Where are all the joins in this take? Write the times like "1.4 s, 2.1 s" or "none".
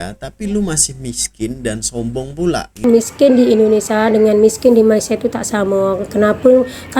2.8 s